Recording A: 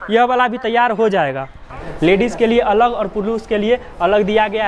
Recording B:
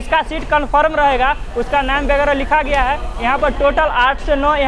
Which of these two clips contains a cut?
A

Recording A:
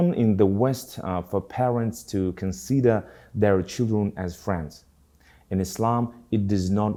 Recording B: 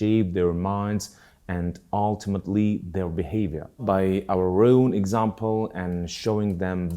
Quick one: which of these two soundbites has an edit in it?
B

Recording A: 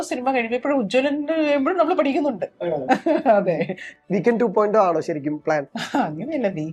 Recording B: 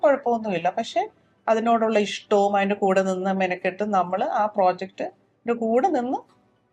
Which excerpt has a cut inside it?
A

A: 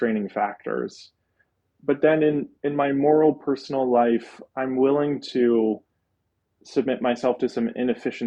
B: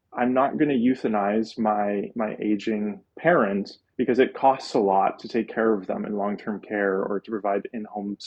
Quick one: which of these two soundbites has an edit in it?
B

